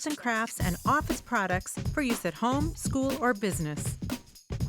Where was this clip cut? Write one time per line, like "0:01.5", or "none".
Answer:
0:03.8